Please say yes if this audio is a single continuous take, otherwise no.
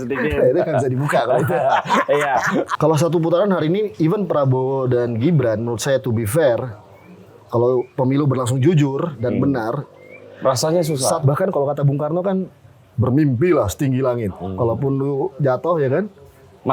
no